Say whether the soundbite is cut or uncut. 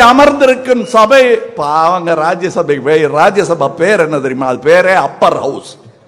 uncut